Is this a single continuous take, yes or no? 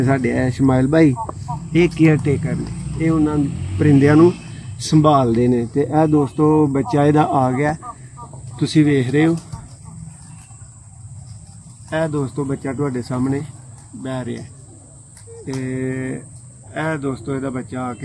yes